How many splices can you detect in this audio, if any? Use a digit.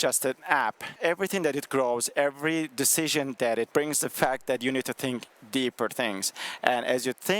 2